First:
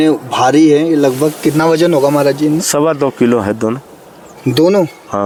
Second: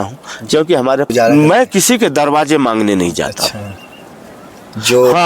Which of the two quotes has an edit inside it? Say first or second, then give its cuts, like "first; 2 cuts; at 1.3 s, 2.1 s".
second; 1 cut; at 1.1 s